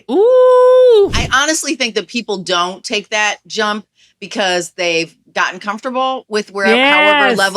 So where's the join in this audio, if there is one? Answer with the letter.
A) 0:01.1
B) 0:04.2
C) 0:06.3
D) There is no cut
A